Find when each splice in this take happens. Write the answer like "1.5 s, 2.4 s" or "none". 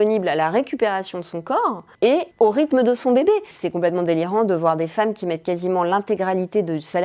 1.9 s